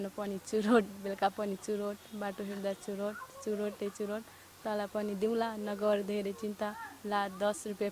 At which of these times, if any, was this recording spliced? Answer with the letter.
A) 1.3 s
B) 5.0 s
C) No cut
C